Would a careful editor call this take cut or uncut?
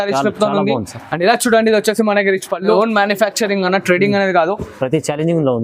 cut